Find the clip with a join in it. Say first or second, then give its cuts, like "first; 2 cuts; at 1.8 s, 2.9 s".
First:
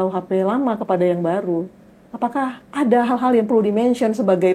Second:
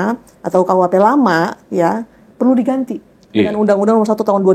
first; 1 cut; at 2.6 s